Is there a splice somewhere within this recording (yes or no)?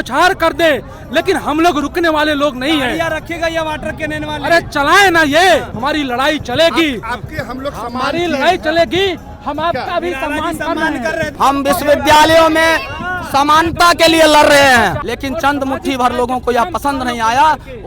yes